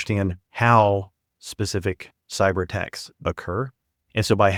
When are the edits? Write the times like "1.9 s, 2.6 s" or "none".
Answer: none